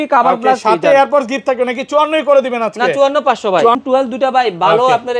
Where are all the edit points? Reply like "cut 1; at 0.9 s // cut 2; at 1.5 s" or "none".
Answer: cut 1; at 3.8 s